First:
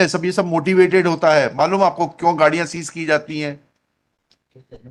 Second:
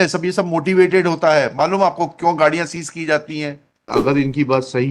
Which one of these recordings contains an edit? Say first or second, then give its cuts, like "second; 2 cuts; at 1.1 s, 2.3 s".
second; 1 cut; at 4.0 s